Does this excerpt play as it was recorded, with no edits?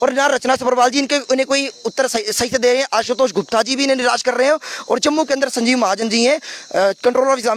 yes; 0 cuts

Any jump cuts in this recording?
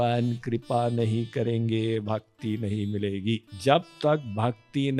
yes; 1 cut; at 3.5 s

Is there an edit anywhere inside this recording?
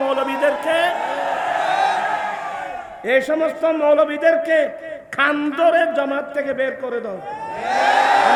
no; 0 cuts

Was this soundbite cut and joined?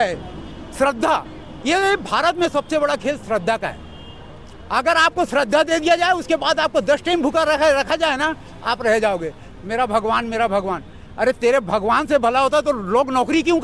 no; 0 cuts

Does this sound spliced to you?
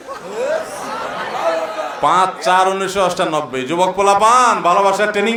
no; 0 cuts

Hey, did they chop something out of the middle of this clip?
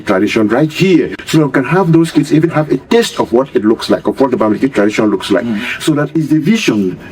yes; 2 cuts; at 1.2 s, 6.1 s

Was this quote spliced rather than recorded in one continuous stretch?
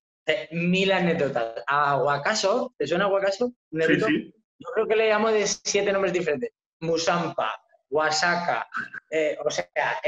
no; 0 cuts

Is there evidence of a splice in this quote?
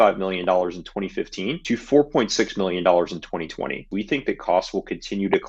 yes; 2 cuts; at 1.6 s, 3.8 s

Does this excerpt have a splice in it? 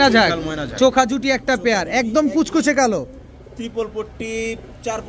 no; 0 cuts

